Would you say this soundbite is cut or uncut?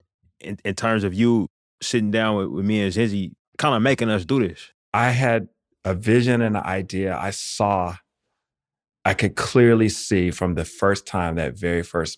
cut